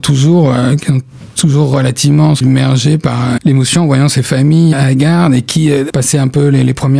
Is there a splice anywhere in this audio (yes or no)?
yes